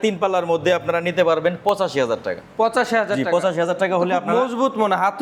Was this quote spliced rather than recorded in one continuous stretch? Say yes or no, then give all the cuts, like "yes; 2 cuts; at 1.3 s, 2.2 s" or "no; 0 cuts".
no; 0 cuts